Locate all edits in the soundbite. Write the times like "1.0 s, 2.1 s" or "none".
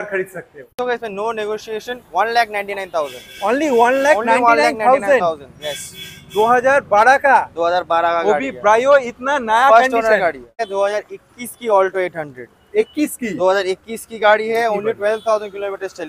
0.8 s, 10.6 s

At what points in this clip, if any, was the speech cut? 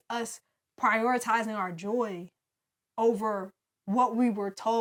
none

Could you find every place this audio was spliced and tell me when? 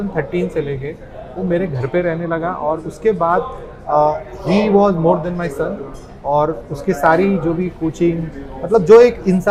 none

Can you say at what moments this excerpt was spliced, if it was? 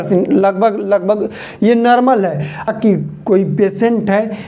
2.7 s

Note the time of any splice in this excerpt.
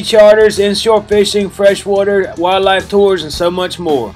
none

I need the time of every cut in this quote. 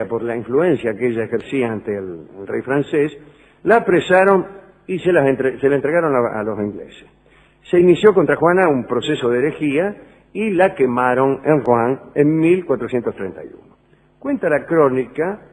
14.3 s

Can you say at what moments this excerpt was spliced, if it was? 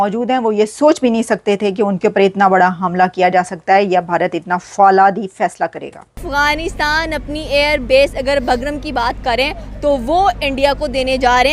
6.3 s

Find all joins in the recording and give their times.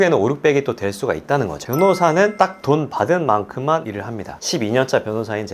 1.7 s, 4.3 s

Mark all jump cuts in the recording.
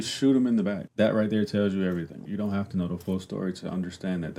0.8 s, 2.2 s

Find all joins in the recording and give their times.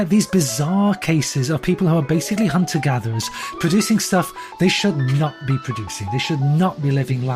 none

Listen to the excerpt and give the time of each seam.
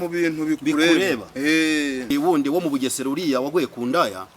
2.1 s

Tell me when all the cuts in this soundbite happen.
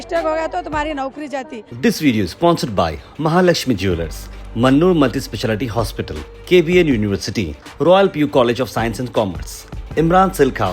1.6 s

